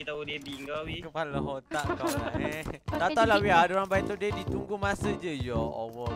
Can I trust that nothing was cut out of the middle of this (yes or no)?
yes